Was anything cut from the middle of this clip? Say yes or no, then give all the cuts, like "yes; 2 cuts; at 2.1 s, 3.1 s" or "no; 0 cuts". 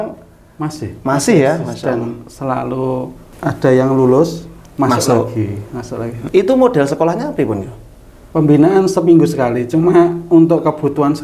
yes; 2 cuts; at 3.2 s, 6.3 s